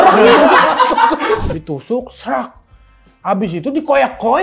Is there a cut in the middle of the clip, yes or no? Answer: yes